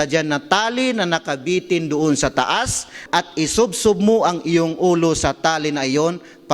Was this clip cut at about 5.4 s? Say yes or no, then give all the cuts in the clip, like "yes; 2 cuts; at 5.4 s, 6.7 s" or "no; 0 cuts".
no; 1 cut; at 2.9 s